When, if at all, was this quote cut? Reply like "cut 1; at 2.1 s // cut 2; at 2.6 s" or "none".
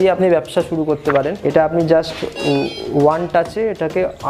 cut 1; at 1.4 s